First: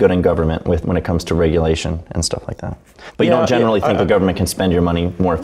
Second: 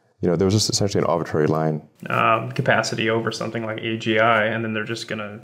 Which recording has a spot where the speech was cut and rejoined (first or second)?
second